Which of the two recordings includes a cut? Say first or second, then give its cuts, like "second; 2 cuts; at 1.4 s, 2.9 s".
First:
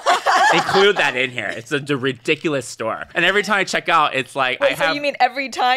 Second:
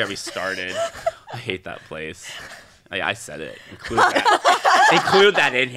first; 1 cut; at 3.1 s